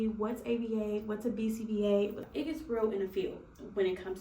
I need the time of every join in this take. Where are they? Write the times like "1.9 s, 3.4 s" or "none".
2.2 s